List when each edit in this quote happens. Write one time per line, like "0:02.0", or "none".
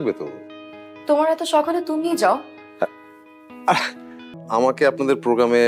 0:04.4

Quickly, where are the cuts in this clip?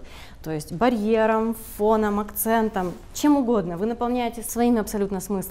0:04.4

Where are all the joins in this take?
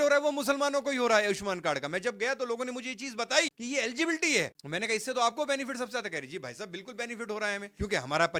none

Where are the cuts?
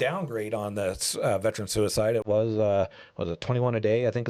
none

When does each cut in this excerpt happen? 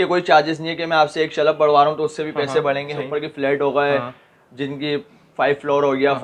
0:03.1

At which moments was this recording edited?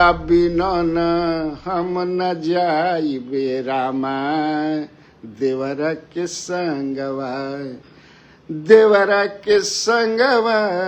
none

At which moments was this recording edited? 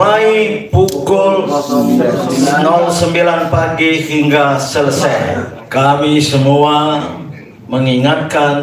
0:05.5

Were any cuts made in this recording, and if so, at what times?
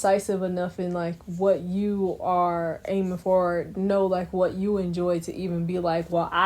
none

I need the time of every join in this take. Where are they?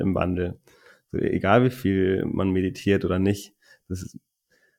none

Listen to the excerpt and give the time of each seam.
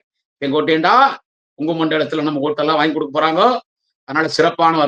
none

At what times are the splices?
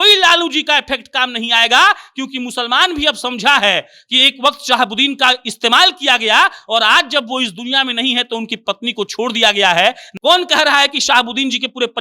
0:10.1

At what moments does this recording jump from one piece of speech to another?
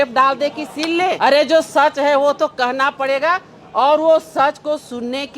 0:01.2

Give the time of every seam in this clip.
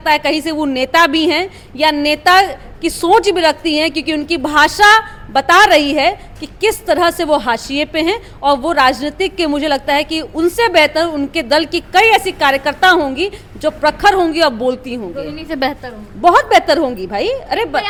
none

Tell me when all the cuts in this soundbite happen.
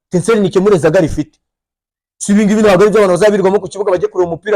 none

